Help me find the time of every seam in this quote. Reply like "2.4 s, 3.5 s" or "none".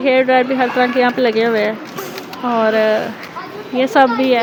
none